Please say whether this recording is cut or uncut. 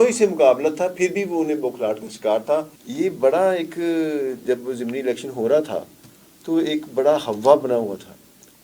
cut